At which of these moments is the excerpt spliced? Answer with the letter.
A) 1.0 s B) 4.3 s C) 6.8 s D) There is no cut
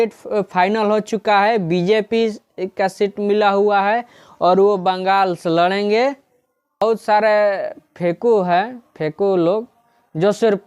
C